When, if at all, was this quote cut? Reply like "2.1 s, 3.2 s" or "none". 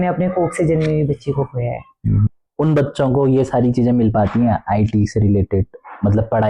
2.4 s